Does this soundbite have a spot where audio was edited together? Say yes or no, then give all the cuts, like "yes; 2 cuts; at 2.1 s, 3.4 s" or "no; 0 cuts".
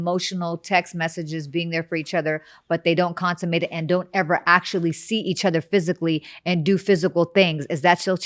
no; 0 cuts